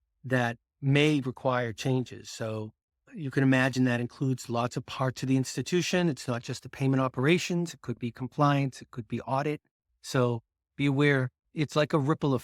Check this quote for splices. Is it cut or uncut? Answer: cut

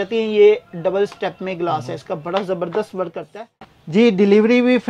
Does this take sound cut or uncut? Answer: cut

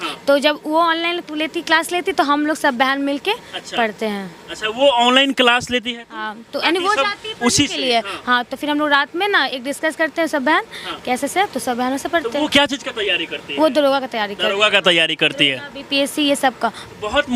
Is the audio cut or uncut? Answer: uncut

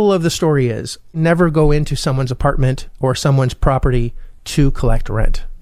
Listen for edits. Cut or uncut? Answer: cut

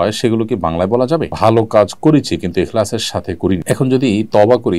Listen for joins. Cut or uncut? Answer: cut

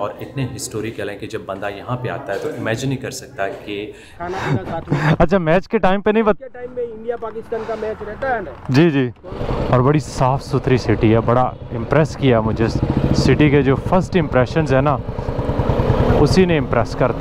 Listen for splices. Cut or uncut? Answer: cut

